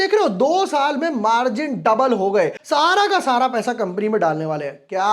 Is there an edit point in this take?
yes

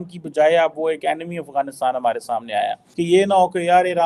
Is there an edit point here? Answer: yes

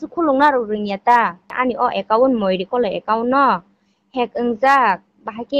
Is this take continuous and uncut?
no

